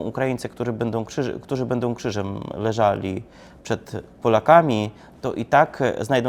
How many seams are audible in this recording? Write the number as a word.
zero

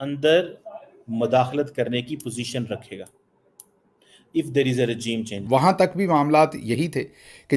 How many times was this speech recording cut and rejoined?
one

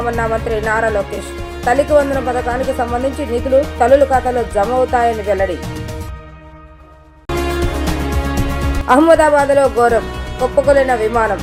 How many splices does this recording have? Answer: zero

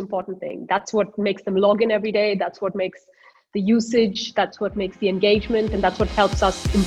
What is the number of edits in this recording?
zero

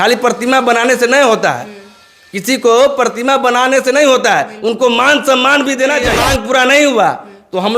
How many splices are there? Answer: one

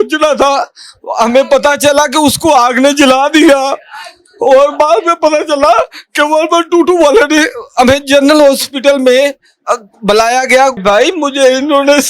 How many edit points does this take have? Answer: one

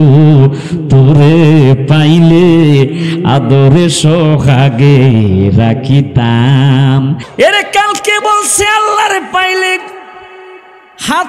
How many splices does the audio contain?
one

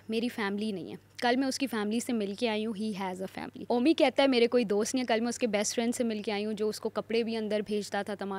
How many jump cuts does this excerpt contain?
one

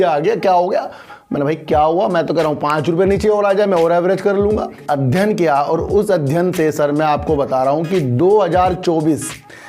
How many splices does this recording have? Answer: one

